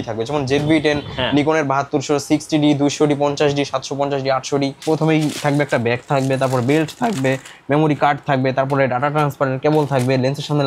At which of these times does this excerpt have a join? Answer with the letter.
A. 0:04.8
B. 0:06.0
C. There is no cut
A